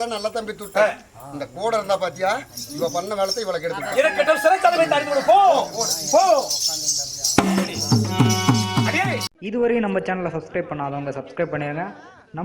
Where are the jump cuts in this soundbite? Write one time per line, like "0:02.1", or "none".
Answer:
0:09.3